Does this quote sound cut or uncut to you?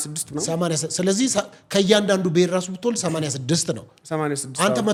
uncut